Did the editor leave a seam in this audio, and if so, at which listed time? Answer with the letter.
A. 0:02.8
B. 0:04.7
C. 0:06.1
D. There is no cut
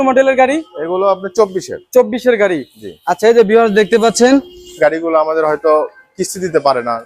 B